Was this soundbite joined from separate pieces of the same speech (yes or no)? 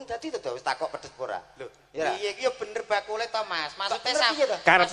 no